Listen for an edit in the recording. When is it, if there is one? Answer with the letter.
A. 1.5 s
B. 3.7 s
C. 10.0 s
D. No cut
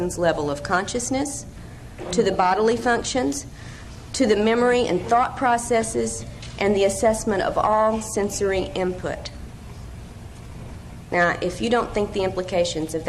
D